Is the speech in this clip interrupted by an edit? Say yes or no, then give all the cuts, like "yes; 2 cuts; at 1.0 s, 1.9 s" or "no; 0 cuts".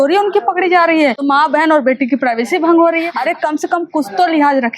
yes; 2 cuts; at 1.2 s, 3.1 s